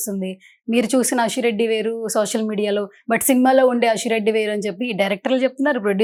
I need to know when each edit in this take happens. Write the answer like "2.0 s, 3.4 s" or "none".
none